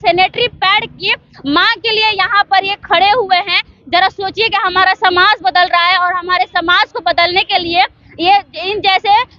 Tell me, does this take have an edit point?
no; 0 cuts

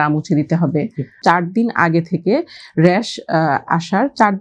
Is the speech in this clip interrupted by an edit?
yes; 1 cut; at 1.2 s

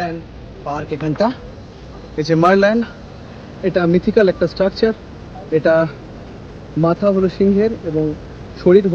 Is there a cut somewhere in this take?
no; 0 cuts

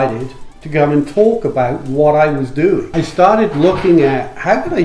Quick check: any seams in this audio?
yes; 1 cut; at 2.9 s

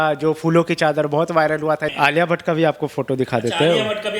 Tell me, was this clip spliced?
yes; 1 cut; at 1.9 s

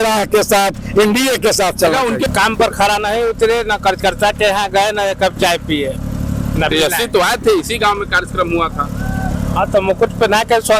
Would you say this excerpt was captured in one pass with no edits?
no; 1 cut; at 2.3 s

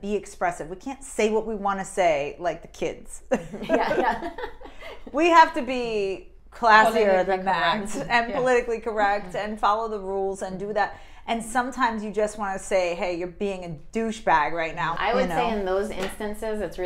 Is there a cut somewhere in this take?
yes; 1 cut; at 14.9 s

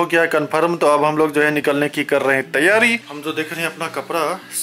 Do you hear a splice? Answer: yes; 1 cut; at 3.1 s

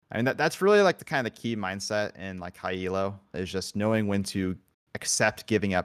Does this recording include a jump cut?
yes; 2 cuts; at 1.0 s, 3.3 s

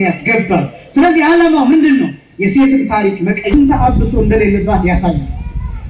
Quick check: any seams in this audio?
yes; 1 cut; at 3.5 s

